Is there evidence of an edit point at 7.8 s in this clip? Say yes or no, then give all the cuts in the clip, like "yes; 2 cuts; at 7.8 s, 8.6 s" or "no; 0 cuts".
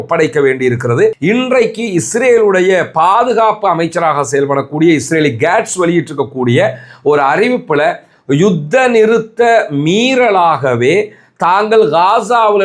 no; 1 cut; at 1.2 s